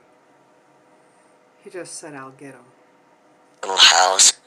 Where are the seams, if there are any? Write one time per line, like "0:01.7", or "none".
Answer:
none